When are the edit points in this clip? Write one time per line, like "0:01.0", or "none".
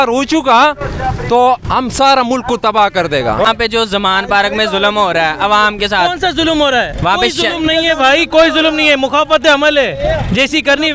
0:03.5